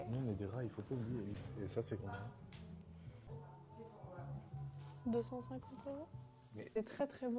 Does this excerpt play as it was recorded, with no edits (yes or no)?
no